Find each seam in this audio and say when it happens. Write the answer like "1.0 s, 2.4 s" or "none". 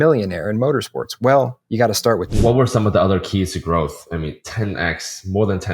2.3 s